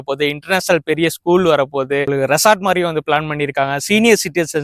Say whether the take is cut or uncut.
uncut